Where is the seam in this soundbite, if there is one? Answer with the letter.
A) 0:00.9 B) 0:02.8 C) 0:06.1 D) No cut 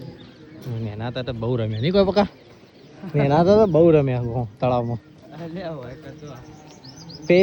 D